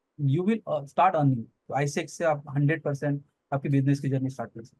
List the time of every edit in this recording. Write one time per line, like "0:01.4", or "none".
0:01.6